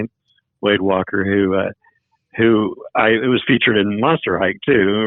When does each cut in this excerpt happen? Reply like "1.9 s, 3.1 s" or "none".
none